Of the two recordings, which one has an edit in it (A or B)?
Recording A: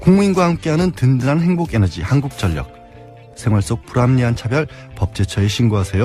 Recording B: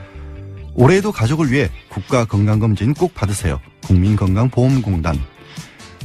B